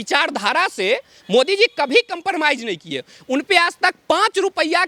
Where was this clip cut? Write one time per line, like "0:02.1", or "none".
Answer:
none